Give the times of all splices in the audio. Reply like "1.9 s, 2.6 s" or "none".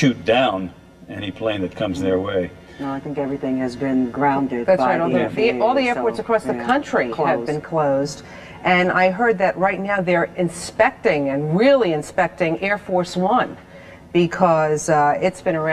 1.1 s